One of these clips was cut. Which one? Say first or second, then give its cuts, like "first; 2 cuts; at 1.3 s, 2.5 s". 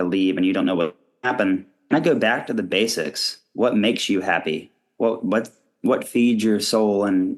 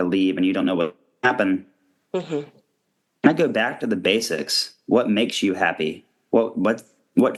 first; 1 cut; at 1.7 s